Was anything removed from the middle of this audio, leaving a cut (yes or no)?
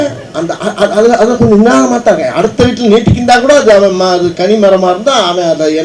no